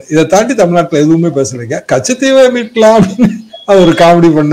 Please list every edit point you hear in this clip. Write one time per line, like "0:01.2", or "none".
none